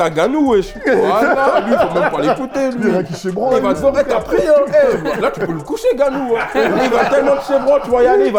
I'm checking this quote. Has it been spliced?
no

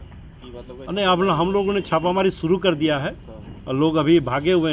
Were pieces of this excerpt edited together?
no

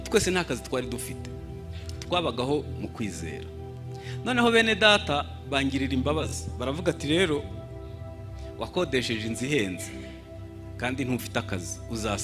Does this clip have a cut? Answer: no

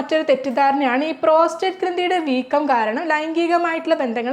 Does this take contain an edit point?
no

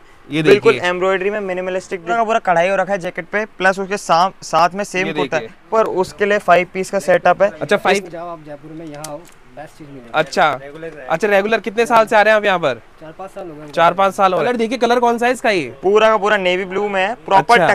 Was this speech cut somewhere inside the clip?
yes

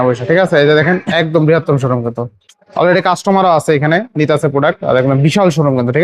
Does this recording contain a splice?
no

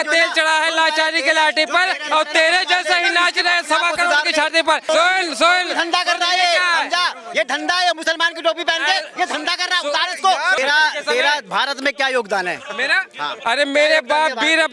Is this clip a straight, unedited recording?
no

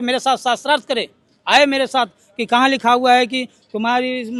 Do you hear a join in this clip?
no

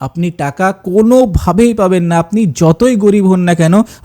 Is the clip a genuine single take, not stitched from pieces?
yes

